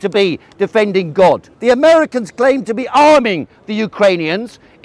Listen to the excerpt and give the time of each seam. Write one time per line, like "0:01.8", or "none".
0:01.5